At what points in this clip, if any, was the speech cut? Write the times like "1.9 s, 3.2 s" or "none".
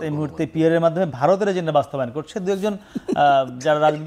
none